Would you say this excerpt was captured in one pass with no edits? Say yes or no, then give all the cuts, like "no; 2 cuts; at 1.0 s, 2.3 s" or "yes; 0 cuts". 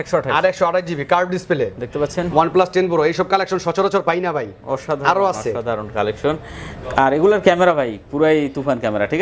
yes; 0 cuts